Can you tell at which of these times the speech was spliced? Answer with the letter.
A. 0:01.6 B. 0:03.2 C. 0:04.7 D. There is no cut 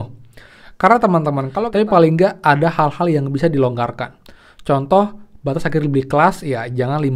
A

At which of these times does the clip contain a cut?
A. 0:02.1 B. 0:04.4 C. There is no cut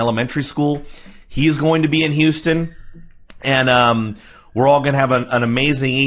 A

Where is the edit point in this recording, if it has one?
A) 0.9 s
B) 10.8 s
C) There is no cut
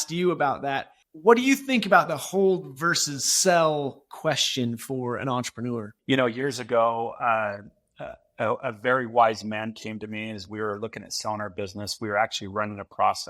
A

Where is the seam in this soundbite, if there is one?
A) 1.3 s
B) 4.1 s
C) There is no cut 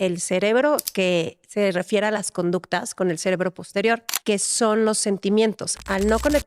B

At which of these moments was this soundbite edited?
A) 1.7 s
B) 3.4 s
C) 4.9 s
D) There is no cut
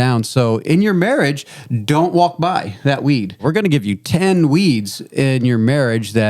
B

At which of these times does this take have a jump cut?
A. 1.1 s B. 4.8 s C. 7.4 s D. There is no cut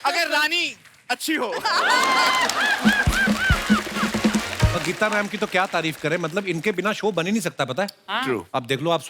B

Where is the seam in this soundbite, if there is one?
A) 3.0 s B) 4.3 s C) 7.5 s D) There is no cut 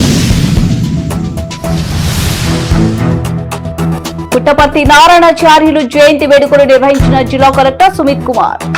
B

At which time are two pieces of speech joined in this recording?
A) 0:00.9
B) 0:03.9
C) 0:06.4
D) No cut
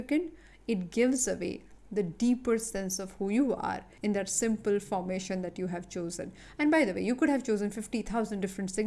B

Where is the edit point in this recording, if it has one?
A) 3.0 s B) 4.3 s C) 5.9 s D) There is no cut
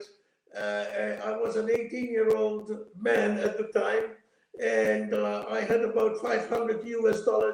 D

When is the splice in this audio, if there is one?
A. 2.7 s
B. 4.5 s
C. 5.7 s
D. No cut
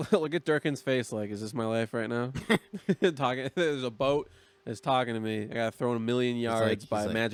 D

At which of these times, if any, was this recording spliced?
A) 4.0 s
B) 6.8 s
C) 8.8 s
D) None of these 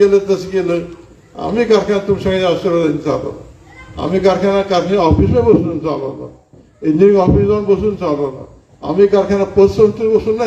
D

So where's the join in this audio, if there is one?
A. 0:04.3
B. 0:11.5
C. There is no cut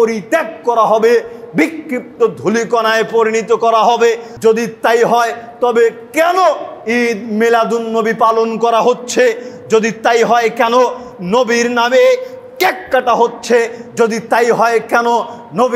A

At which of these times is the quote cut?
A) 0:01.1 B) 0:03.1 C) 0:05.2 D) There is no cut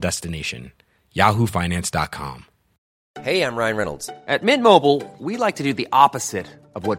B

